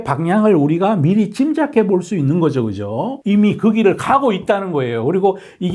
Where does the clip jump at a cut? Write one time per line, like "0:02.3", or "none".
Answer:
none